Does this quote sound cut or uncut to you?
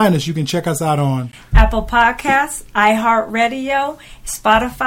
uncut